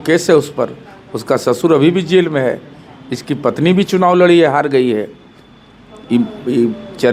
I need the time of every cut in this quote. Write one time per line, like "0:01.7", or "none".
none